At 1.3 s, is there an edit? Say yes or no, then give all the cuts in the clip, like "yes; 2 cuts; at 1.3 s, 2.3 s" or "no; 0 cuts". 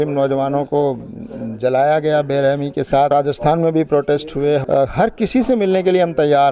no; 2 cuts; at 3.1 s, 4.6 s